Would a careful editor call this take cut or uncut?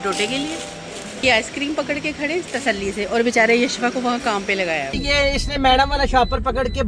cut